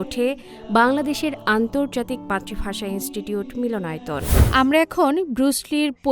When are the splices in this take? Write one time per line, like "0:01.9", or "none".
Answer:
0:04.4